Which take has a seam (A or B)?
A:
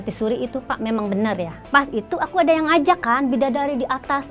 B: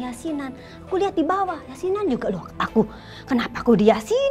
A